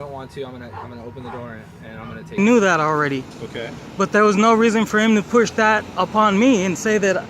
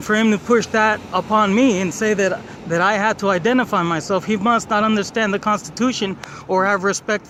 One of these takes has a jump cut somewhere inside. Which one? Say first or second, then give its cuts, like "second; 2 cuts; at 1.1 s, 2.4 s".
first; 1 cut; at 2.4 s